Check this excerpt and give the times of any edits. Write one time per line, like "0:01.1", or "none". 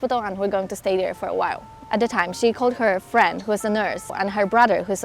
0:01.7
0:04.1